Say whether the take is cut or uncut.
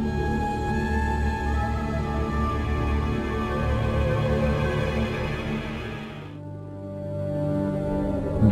uncut